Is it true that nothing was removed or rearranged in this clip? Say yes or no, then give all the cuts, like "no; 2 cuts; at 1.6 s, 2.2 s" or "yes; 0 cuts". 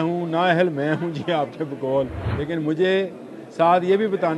no; 1 cut; at 2.3 s